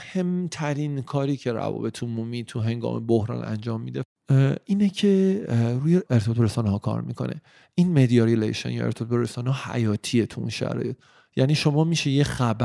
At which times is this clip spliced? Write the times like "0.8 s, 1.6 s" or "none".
4.0 s, 6.0 s